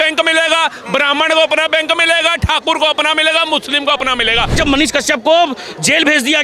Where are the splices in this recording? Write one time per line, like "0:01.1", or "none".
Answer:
0:04.6